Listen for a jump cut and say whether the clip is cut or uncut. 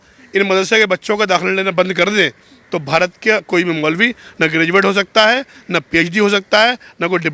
uncut